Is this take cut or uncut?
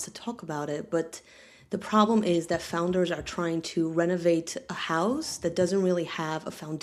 uncut